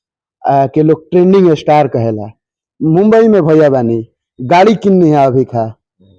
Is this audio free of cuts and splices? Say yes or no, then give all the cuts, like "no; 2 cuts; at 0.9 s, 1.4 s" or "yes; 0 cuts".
yes; 0 cuts